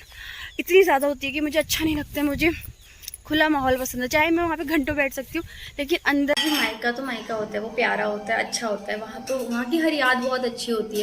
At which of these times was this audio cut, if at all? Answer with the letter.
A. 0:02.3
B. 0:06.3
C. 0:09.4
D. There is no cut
B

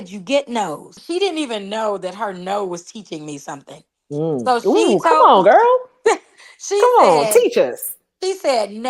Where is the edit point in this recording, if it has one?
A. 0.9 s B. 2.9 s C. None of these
A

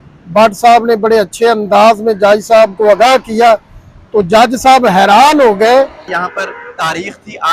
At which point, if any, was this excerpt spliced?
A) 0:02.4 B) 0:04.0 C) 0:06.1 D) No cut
C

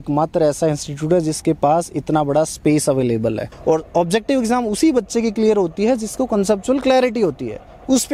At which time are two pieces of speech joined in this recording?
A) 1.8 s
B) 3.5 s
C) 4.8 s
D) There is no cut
B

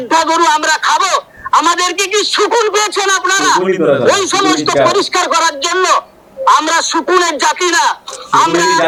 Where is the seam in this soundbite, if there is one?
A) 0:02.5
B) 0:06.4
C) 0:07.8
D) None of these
D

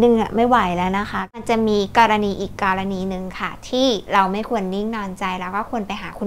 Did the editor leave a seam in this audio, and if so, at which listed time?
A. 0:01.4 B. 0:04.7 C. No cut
A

